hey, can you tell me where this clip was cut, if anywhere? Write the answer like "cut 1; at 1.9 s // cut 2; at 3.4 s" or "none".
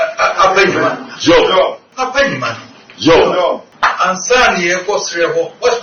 cut 1; at 1.9 s // cut 2; at 3.7 s